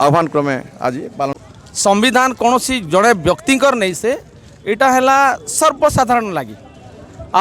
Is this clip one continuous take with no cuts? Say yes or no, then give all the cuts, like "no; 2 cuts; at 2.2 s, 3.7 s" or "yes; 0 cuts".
no; 1 cut; at 1.4 s